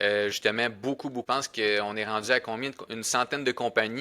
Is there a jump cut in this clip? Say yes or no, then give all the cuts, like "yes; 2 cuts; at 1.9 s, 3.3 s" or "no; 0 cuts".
yes; 1 cut; at 1.2 s